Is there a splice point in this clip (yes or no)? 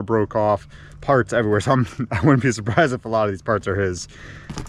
no